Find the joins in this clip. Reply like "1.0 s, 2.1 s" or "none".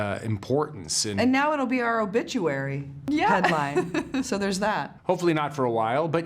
2.9 s, 4.9 s

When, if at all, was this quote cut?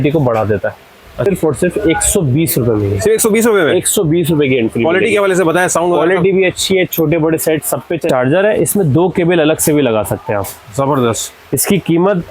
1.3 s, 8.1 s

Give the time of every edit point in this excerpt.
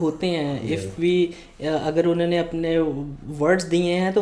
none

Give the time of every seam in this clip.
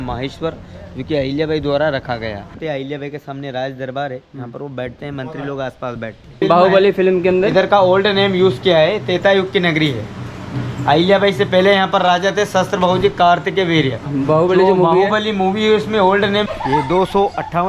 2.5 s, 6.4 s, 14.1 s, 16.5 s

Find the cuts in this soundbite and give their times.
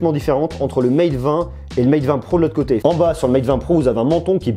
2.8 s

